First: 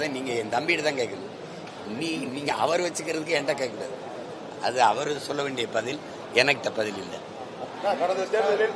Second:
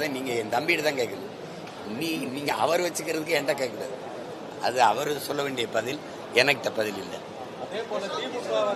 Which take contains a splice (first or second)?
first